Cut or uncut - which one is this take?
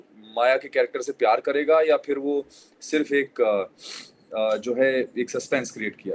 uncut